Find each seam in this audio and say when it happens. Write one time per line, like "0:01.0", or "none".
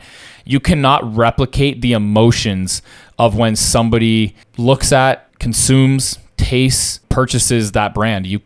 0:04.4
0:05.3
0:07.0